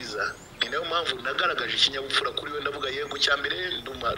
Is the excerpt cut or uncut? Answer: uncut